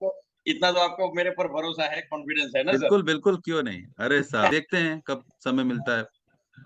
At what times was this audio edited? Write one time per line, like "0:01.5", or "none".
0:04.5

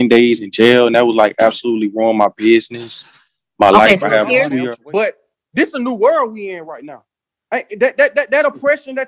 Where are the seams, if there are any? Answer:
0:04.7

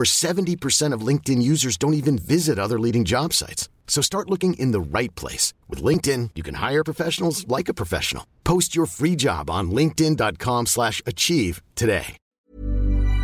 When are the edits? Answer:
0:12.3

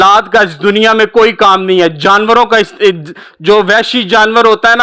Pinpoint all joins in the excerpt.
none

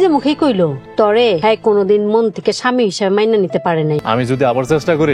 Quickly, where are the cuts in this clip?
0:01.3
0:04.0

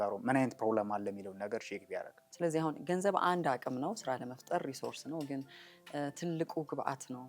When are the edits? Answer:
0:02.2

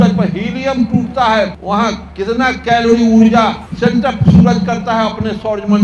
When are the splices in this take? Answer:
0:01.7
0:03.6

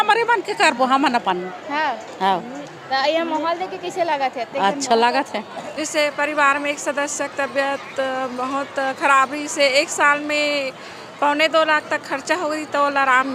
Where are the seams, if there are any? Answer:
0:05.6

